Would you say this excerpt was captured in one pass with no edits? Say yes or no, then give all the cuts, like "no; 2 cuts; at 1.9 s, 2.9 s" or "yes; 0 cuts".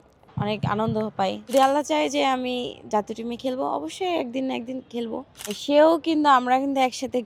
no; 2 cuts; at 1.4 s, 5.6 s